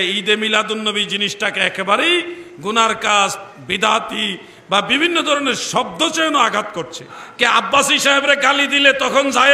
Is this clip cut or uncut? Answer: cut